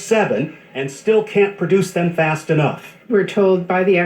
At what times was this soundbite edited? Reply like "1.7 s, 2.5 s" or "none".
1.4 s, 3.1 s